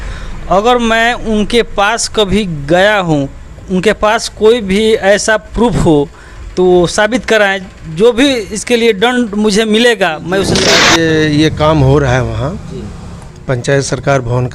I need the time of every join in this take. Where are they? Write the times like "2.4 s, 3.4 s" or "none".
10.7 s